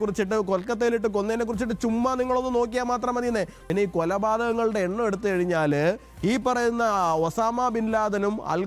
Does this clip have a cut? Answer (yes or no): yes